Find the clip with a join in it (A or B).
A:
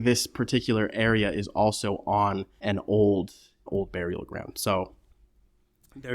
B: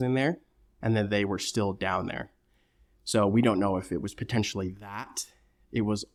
A